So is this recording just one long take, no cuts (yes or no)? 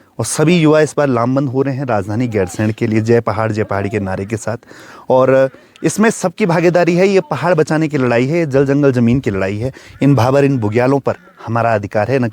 yes